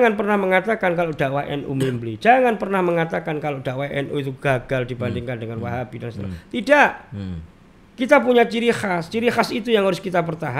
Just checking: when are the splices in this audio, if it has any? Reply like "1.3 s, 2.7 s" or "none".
none